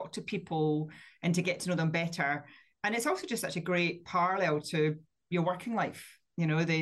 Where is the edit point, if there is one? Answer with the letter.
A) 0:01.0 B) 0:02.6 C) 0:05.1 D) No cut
B